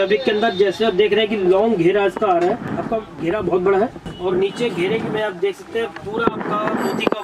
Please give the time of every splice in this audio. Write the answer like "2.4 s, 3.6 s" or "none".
none